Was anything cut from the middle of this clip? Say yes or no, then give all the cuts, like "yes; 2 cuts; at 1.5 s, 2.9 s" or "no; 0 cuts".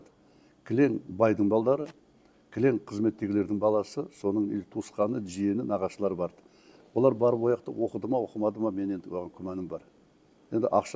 no; 0 cuts